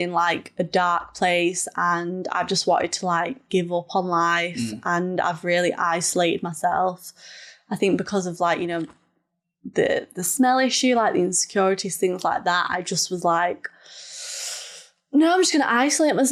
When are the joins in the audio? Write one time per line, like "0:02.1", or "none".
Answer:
none